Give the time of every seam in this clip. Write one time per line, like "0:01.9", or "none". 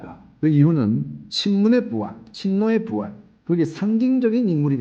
0:01.2

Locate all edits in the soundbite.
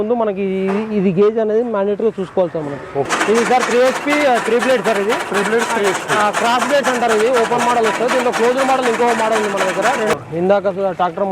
0:03.1
0:10.2

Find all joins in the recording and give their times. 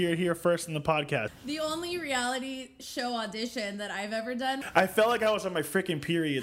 0:01.3
0:04.6

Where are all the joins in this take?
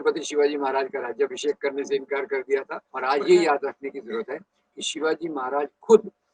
0:02.8

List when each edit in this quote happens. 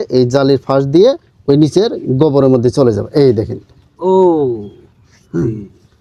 none

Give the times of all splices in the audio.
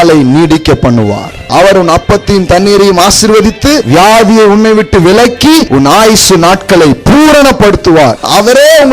0:01.5
0:03.8
0:05.7
0:08.2

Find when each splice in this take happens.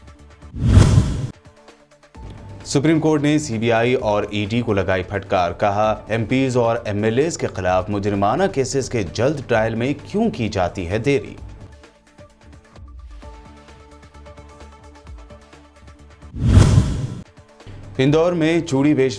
none

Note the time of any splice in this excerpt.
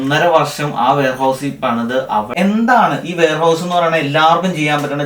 0:02.3

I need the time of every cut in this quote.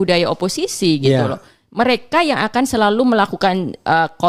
none

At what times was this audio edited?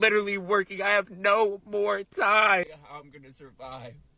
0:02.7

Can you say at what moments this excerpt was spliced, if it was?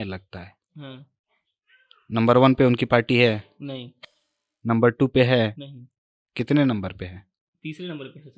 none

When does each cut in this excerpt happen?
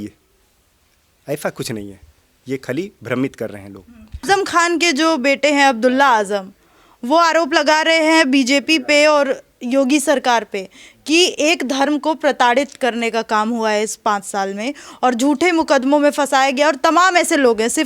0:04.2

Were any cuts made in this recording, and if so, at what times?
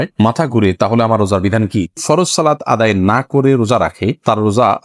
0:01.9

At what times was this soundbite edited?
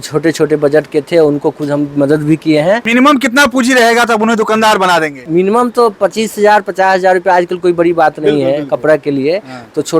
0:02.8
0:05.2

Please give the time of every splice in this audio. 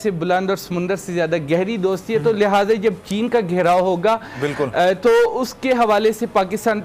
none

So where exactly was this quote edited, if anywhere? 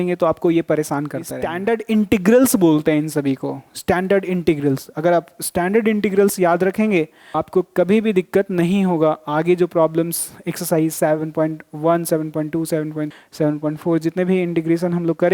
0:01.4
0:07.4
0:13.1

